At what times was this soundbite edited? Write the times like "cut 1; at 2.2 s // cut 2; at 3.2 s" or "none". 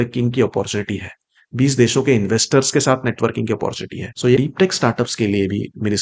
cut 1; at 4.3 s